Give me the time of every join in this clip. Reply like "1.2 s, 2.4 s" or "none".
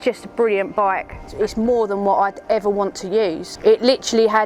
1.2 s, 3.5 s